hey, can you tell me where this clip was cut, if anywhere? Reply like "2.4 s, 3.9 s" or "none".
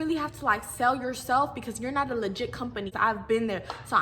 2.9 s